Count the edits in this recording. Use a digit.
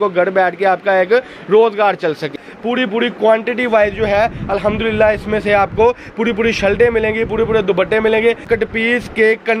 2